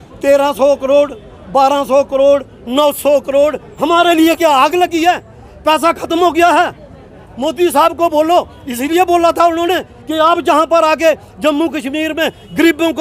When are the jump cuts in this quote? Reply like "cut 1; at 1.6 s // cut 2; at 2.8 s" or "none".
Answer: none